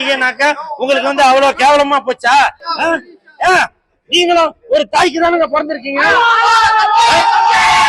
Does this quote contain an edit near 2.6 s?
yes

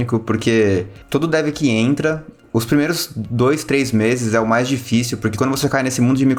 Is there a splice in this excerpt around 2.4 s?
yes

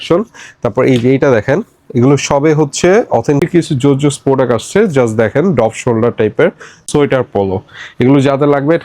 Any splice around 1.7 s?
no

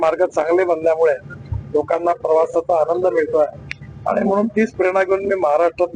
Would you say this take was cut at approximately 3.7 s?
no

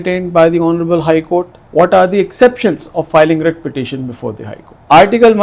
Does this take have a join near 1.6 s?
yes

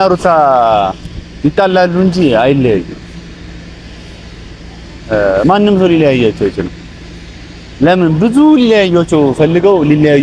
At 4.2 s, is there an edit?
no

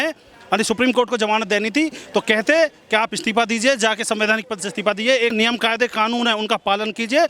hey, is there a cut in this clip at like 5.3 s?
yes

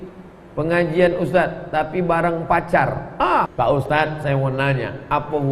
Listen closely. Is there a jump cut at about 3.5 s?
yes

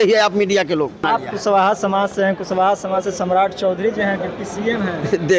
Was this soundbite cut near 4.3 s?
no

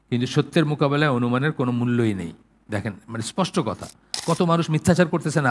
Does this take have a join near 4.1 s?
yes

